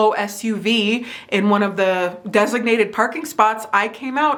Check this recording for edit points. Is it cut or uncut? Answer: uncut